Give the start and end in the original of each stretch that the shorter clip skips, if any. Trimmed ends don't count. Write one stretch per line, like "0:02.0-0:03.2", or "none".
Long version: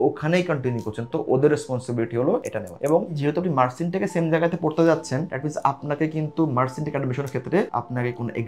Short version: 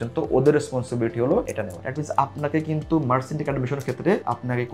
0:02.7-0:05.2